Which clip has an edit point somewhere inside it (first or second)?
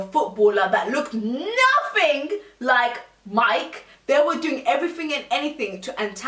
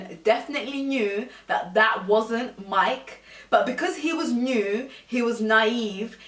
first